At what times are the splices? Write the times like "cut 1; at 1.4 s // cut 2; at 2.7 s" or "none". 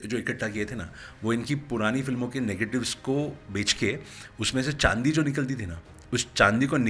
none